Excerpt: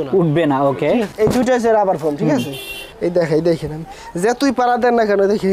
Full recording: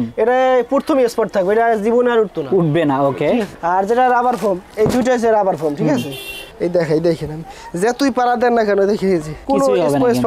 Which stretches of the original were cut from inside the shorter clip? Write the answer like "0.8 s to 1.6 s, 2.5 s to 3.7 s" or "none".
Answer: 3.5 s to 4.7 s